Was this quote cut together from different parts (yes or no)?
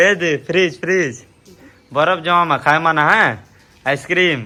no